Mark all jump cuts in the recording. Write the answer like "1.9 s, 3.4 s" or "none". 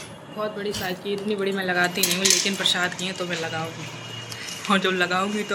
none